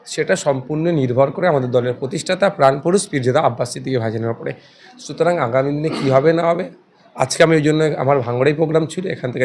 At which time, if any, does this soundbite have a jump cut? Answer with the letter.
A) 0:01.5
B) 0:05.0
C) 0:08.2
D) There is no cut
D